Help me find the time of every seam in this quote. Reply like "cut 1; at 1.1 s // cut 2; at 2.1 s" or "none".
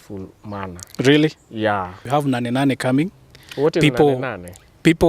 cut 1; at 2.0 s